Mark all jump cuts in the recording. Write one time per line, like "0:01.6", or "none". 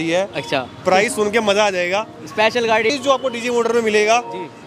0:02.9